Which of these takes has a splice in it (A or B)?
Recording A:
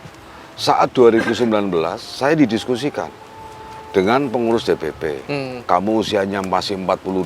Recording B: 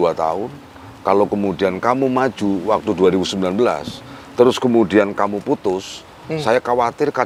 A